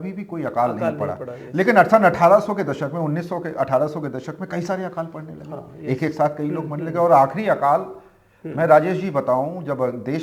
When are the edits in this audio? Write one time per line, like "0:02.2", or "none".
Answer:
none